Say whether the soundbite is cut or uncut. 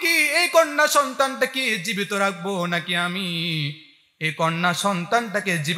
uncut